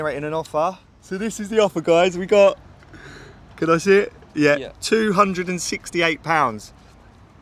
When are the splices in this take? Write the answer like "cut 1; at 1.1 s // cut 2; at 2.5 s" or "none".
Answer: none